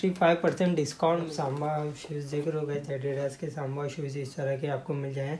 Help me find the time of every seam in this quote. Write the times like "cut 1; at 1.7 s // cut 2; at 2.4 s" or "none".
cut 1; at 1.3 s